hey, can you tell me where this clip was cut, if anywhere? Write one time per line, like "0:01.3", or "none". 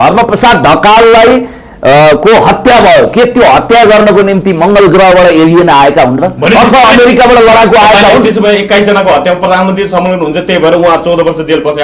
none

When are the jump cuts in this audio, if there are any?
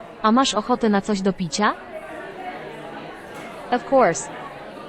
0:01.8
0:03.7

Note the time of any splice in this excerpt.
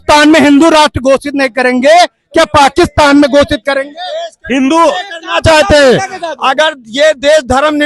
none

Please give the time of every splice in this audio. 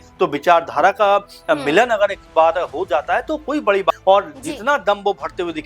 0:03.9

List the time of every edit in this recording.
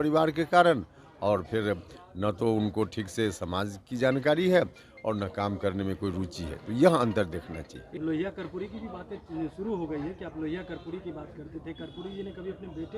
0:07.8

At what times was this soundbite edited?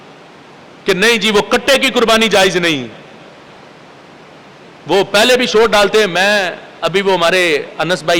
none

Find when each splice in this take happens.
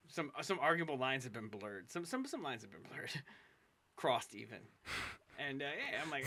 none

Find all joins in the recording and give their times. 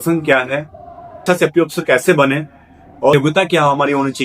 0:01.2
0:03.1

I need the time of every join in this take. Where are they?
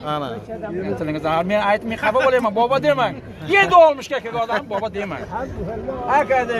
0:01.0

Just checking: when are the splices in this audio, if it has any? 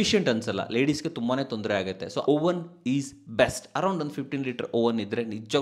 0:02.2

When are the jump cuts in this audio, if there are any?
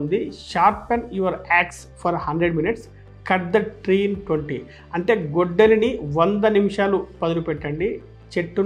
none

